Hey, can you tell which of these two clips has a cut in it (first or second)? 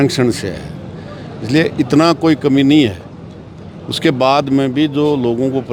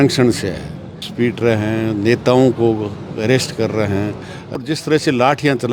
second